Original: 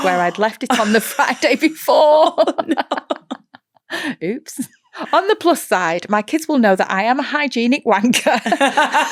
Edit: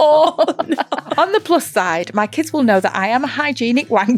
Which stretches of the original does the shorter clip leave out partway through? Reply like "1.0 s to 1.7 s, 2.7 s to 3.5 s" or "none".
3.1 s to 5.0 s